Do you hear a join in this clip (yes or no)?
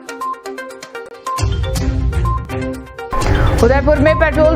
yes